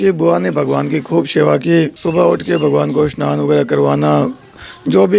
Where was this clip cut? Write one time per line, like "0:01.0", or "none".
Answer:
0:02.0